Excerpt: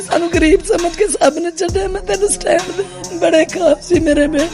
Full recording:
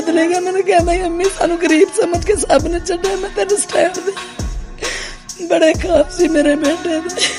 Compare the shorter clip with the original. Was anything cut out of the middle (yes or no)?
yes